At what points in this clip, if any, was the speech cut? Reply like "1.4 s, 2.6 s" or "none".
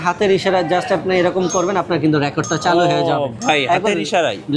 none